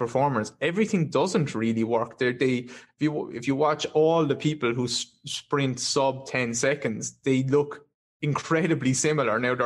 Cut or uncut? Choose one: uncut